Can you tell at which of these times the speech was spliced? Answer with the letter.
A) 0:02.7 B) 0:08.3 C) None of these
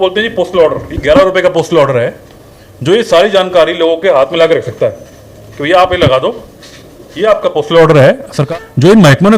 B